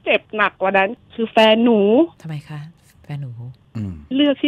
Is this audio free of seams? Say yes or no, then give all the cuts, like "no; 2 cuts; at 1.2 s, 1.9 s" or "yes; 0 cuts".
no; 1 cut; at 2.2 s